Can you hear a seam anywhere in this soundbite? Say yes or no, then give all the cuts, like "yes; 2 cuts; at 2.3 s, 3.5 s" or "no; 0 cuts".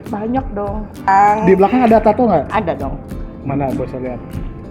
yes; 1 cut; at 1.1 s